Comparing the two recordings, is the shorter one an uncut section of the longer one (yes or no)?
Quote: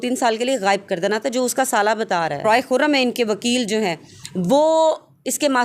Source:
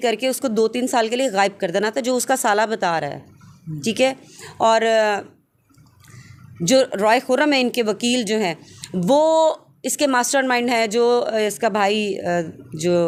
no